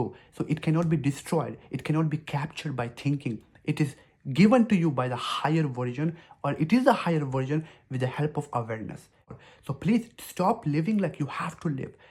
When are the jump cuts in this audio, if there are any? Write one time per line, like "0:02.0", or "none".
0:09.3

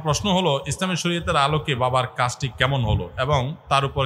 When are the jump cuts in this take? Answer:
none

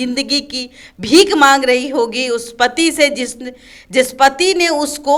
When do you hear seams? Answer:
none

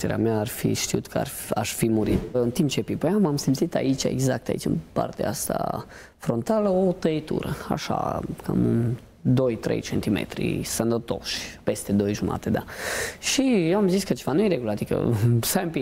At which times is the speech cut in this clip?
0:02.3

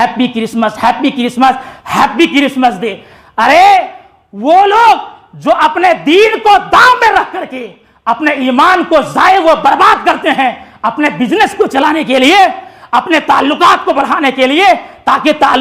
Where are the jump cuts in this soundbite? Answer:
none

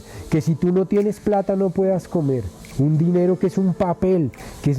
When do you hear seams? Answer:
0:02.6

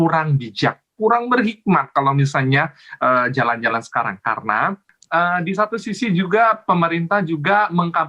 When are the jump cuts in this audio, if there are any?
0:04.9

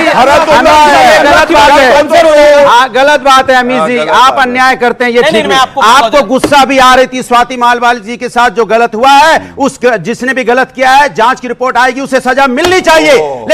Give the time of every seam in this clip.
none

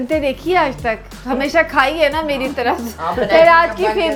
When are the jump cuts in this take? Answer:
none

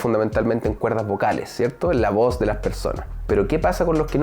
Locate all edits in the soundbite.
0:03.1

